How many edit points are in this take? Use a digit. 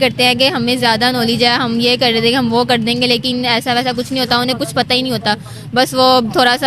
0